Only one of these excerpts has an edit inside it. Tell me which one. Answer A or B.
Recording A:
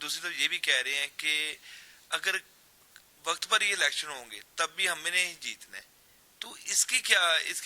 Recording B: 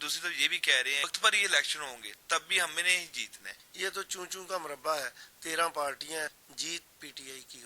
B